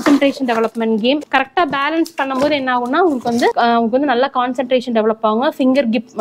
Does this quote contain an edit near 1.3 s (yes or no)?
no